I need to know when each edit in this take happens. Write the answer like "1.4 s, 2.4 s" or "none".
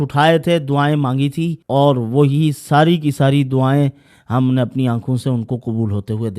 1.6 s